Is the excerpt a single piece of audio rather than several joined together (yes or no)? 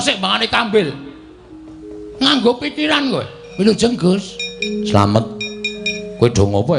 no